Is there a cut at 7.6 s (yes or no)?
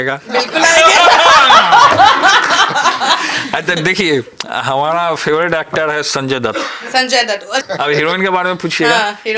yes